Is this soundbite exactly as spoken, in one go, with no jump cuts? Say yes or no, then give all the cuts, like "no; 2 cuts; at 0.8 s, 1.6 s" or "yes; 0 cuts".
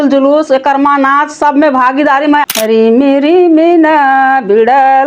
no; 1 cut; at 2.5 s